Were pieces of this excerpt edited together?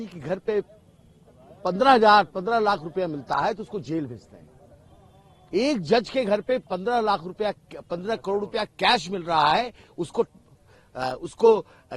no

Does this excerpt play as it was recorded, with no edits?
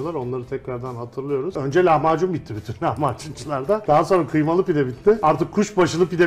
no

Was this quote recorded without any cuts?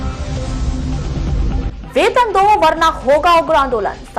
yes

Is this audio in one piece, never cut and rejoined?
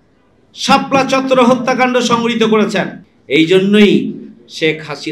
no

